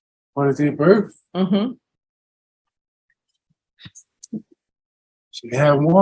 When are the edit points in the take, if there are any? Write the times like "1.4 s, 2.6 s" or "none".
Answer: none